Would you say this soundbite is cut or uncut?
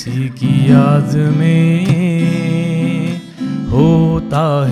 uncut